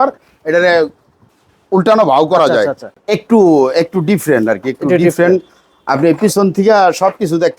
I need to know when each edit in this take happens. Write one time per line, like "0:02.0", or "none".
0:02.9